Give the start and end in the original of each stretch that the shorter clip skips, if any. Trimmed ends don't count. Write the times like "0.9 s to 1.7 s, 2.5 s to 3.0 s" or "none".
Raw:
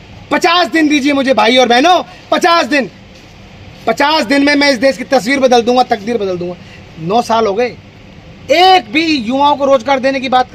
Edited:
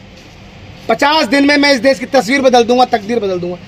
none